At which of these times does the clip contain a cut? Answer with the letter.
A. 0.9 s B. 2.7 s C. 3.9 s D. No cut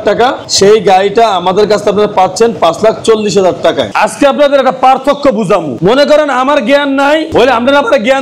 C